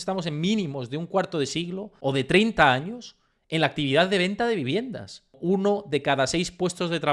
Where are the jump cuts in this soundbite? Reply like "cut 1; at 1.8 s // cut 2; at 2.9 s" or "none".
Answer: cut 1; at 1.9 s // cut 2; at 5.4 s